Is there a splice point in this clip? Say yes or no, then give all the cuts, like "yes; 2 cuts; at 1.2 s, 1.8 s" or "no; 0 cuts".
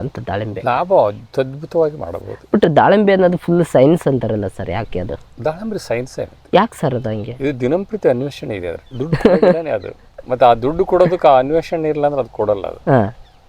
no; 0 cuts